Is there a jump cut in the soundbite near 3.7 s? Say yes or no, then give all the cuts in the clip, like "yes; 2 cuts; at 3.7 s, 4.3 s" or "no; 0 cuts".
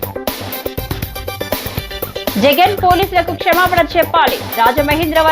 no; 1 cut; at 1.1 s